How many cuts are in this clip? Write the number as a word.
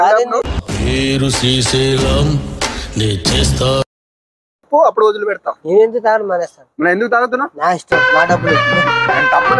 zero